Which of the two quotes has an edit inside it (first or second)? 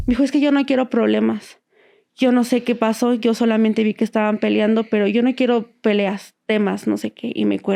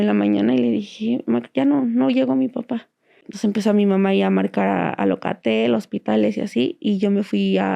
second